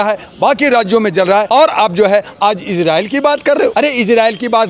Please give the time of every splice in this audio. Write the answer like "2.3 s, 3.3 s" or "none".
1.5 s, 3.7 s